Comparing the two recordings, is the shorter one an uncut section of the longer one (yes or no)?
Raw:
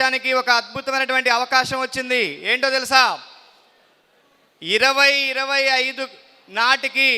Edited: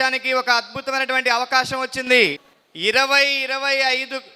no